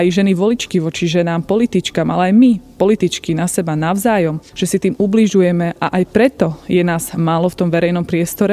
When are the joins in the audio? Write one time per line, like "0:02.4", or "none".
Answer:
0:04.5